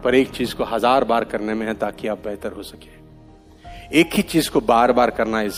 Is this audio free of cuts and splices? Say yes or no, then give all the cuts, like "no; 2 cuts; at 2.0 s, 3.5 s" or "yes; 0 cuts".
yes; 0 cuts